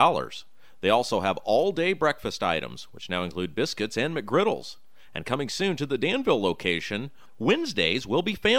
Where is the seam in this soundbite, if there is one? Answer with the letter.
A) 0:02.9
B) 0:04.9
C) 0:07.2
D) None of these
D